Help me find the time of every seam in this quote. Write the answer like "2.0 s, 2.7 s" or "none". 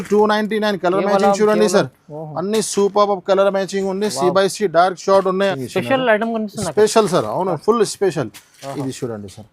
5.5 s